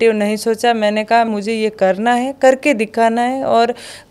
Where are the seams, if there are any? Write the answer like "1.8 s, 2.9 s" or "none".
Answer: 1.3 s